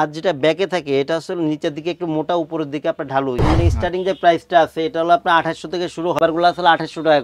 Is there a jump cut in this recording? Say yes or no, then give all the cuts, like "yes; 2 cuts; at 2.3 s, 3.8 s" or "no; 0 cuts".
yes; 2 cuts; at 3.5 s, 6.2 s